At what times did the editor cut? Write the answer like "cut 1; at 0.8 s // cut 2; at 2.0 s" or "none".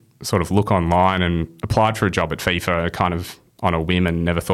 none